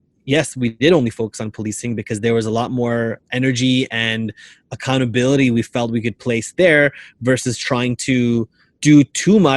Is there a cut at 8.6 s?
yes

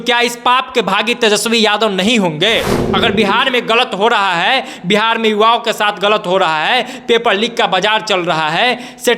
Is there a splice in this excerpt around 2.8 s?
yes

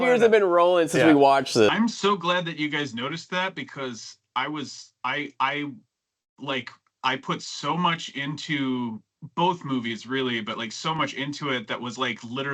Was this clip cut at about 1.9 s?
no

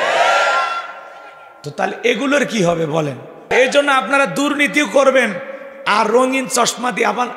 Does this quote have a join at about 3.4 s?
yes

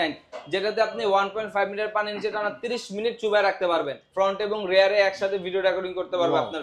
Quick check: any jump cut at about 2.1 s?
no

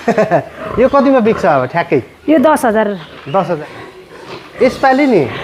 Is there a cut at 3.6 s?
yes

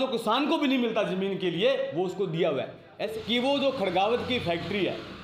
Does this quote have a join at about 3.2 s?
yes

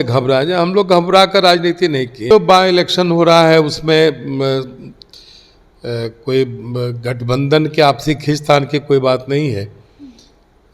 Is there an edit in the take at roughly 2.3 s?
yes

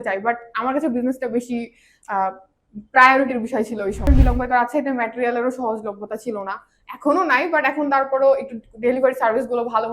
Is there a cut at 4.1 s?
yes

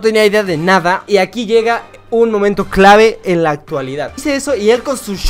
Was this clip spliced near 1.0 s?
yes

